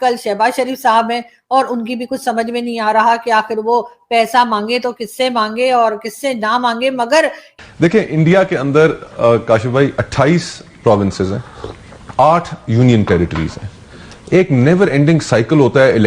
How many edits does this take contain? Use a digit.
1